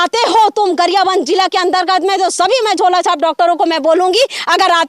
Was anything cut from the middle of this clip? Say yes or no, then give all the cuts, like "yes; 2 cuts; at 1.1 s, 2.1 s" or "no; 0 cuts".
no; 0 cuts